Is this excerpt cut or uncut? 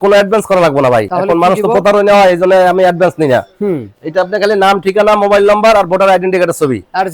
uncut